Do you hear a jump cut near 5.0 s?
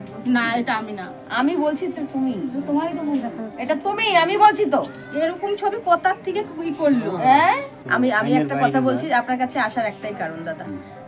no; 1 cut; at 7.8 s

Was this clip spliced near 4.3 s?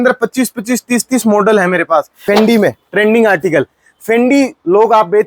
no; 1 cut; at 2.2 s

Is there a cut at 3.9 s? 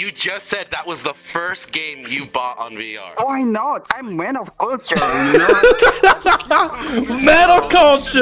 yes; 2 cuts; at 3.0 s, 3.9 s

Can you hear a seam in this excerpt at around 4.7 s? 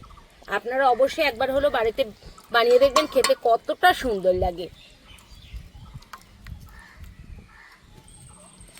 yes; 1 cut; at 4.7 s

